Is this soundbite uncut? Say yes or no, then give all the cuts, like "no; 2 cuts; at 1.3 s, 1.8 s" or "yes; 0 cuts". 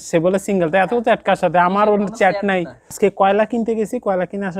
no; 1 cut; at 2.8 s